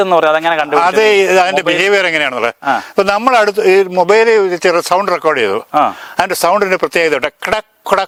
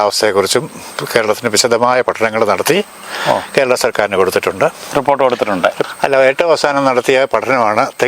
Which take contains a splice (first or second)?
second